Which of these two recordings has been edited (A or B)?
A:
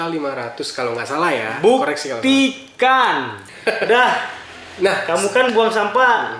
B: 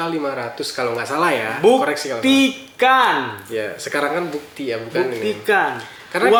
A